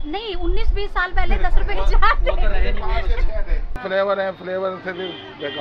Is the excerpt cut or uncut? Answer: cut